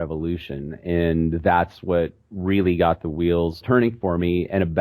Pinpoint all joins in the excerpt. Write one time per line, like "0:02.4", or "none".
0:03.6